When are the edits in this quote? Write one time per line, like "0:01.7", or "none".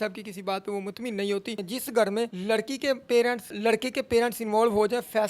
0:01.6
0:02.4
0:03.5